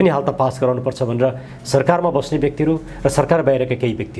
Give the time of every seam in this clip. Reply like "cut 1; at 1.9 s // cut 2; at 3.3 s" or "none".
none

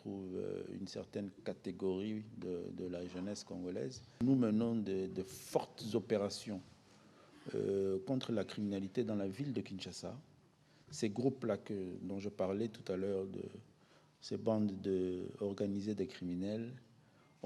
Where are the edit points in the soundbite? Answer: cut 1; at 4.2 s

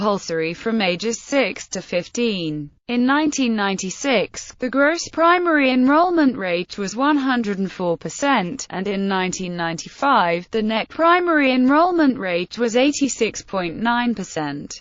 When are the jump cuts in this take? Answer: none

